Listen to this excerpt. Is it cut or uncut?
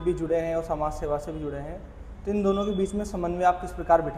uncut